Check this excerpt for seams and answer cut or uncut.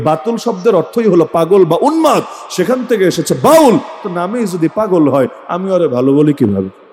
uncut